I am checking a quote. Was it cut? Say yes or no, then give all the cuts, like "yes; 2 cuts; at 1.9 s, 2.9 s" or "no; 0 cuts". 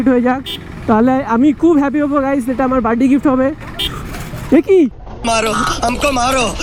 no; 0 cuts